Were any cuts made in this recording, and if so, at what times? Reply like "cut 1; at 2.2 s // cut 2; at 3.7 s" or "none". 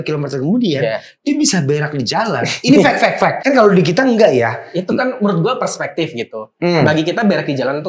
cut 1; at 3.4 s